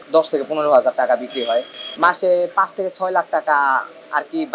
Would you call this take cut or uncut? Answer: cut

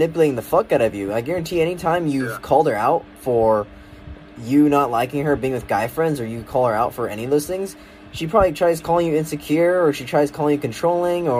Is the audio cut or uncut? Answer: uncut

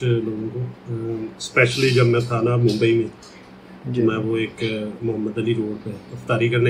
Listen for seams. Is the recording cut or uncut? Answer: uncut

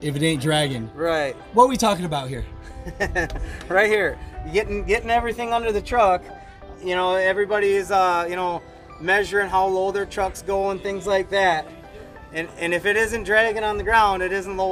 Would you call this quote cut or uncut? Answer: uncut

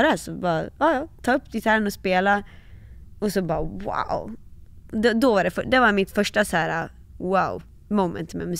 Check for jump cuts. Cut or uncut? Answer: cut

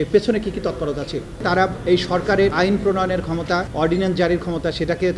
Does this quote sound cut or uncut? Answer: cut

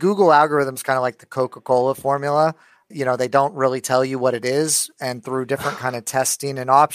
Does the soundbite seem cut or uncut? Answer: uncut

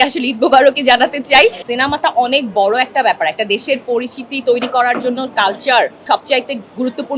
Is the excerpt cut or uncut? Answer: cut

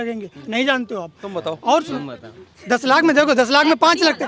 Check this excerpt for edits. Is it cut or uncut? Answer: uncut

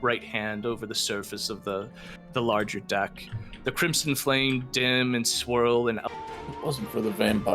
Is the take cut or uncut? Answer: cut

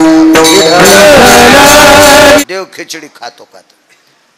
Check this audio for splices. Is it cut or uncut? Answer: cut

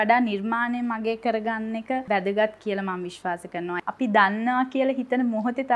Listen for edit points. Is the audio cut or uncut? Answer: cut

